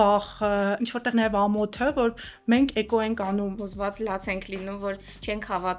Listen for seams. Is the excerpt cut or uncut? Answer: cut